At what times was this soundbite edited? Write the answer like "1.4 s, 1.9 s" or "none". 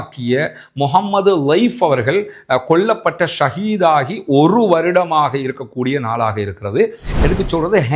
7.0 s